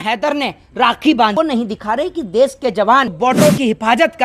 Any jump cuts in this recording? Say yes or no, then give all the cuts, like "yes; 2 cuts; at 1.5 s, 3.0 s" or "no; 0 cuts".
yes; 2 cuts; at 1.3 s, 3.1 s